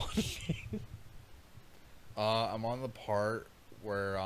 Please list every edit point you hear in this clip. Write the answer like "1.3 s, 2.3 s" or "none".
none